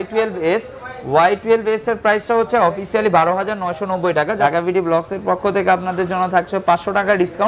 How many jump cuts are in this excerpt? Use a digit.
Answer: 1